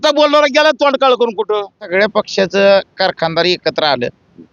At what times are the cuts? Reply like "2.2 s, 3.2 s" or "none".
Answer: 1.9 s